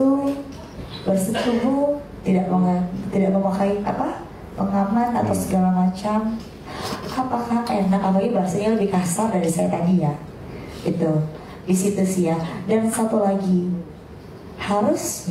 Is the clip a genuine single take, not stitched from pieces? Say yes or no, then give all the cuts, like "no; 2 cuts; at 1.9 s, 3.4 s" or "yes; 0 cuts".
yes; 0 cuts